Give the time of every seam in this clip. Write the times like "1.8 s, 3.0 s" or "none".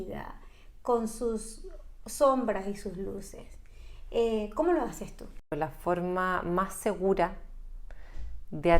5.5 s